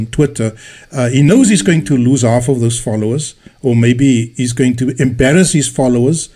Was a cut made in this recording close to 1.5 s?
no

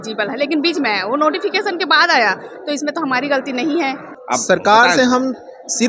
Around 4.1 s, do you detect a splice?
yes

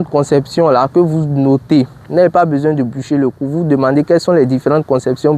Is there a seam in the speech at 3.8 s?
no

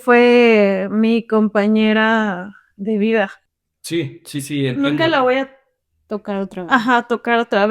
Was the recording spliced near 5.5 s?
no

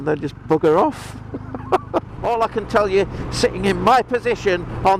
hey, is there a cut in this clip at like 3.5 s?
no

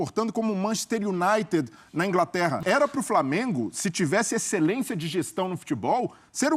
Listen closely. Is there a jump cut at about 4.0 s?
no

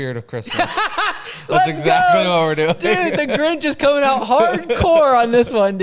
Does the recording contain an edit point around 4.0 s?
no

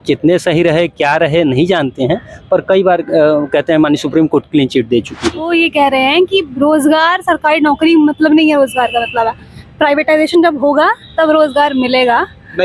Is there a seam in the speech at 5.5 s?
yes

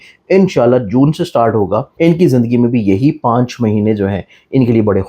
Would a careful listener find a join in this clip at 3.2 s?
no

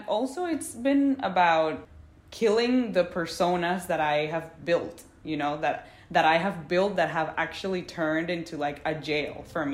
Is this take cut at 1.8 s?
yes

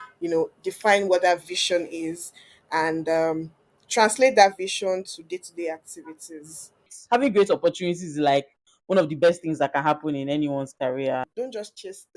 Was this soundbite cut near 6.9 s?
yes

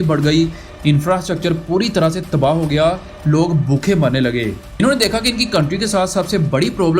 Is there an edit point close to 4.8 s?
yes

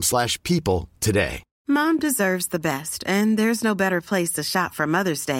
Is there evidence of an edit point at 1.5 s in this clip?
yes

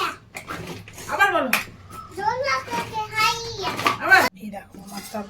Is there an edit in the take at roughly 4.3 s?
yes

